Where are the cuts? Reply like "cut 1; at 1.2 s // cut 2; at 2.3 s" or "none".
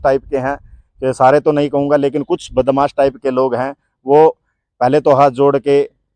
none